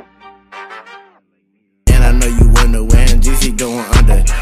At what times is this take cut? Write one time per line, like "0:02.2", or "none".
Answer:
0:01.1